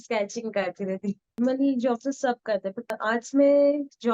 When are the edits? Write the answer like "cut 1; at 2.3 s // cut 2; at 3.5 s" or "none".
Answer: cut 1; at 1.4 s // cut 2; at 2.9 s